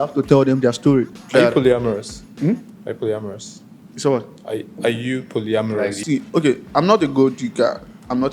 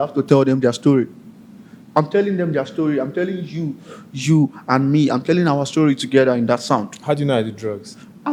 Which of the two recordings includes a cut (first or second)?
first